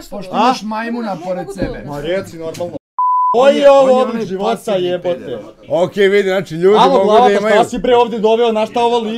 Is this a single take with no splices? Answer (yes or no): no